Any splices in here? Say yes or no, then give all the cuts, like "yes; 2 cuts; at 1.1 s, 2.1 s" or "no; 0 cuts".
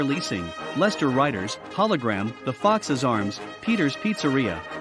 no; 0 cuts